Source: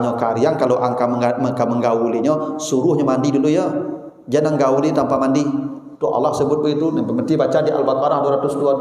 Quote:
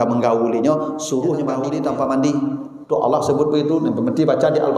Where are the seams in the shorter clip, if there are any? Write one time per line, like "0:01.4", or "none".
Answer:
0:01.6